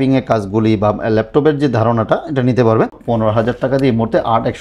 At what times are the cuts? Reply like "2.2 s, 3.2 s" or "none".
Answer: 3.0 s